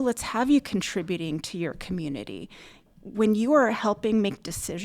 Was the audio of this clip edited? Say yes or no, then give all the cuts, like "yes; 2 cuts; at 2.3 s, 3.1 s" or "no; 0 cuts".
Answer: yes; 1 cut; at 2.9 s